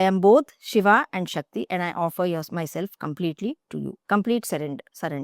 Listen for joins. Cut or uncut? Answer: cut